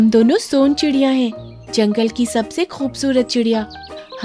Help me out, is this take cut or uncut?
uncut